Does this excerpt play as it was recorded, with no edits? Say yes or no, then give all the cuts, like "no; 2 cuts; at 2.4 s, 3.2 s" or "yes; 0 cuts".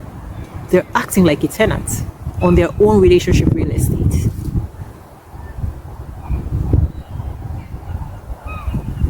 yes; 0 cuts